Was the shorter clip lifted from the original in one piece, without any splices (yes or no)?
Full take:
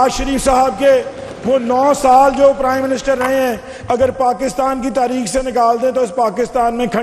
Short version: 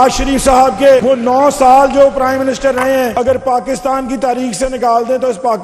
no